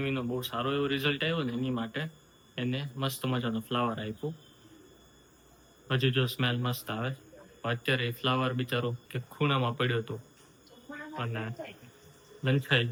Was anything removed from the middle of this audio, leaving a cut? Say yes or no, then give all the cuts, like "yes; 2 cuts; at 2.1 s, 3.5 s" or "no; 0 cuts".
no; 0 cuts